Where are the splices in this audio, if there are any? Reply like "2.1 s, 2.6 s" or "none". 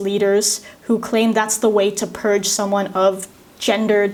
none